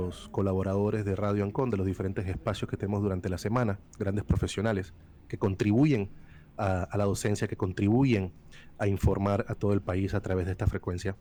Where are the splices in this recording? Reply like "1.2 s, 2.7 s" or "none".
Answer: none